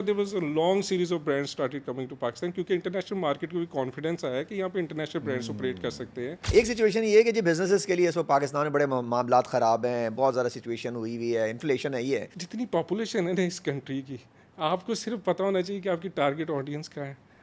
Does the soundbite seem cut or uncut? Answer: cut